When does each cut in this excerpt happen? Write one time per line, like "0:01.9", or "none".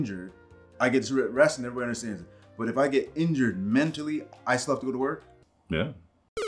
none